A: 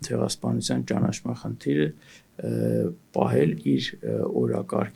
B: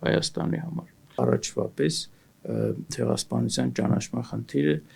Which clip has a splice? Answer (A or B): B